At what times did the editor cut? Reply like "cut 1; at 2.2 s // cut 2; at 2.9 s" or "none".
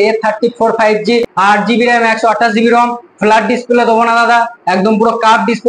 cut 1; at 1.3 s